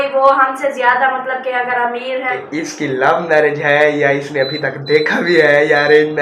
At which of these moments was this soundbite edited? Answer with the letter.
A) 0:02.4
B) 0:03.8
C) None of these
A